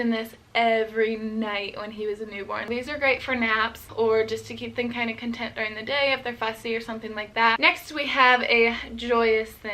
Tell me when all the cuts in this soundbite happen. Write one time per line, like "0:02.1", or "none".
0:02.7
0:03.8
0:07.6